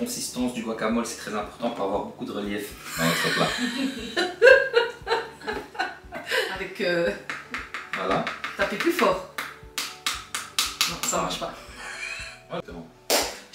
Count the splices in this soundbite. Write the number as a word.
two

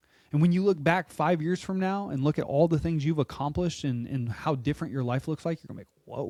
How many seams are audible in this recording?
zero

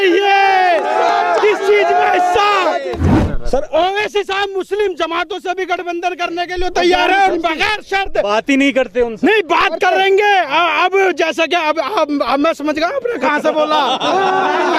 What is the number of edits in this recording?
one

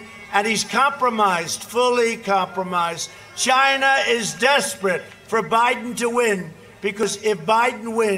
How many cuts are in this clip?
one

